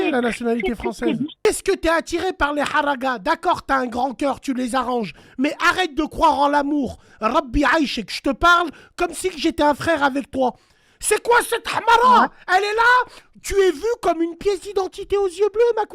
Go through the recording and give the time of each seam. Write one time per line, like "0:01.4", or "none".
0:01.4